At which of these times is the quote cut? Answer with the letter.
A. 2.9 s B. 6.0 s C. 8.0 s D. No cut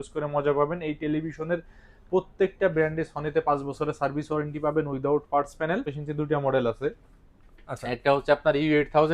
B